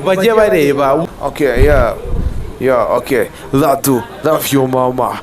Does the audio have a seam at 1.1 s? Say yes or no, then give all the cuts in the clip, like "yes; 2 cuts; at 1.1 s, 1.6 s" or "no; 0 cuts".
yes; 1 cut; at 1.1 s